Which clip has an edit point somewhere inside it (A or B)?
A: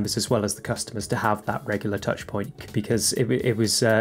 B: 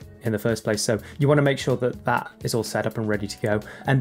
B